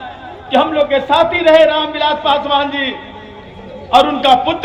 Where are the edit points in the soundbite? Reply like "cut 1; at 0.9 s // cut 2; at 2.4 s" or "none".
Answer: none